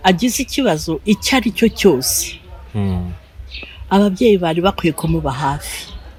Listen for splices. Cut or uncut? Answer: uncut